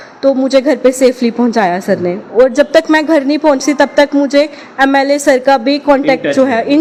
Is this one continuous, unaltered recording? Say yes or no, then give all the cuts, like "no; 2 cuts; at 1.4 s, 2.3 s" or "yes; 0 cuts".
yes; 0 cuts